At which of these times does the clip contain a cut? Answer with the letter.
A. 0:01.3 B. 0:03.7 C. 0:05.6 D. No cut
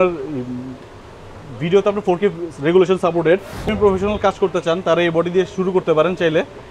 B